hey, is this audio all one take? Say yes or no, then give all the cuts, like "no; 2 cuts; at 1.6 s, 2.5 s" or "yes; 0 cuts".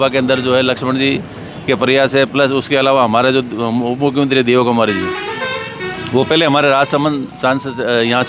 yes; 0 cuts